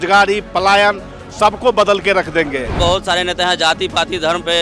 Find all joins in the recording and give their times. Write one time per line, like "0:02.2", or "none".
0:02.8